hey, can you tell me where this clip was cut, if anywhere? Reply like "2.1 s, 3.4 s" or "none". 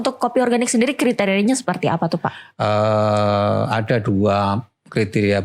none